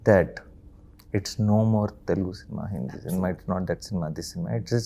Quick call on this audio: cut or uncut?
uncut